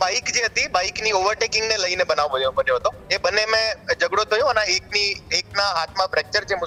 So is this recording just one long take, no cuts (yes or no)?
yes